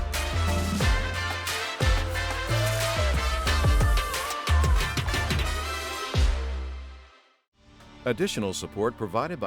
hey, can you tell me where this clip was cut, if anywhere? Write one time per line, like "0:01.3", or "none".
0:07.9